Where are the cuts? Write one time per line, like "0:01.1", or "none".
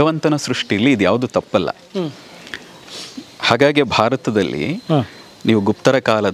none